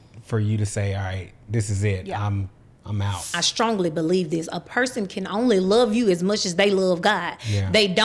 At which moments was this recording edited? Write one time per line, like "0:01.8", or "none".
0:03.4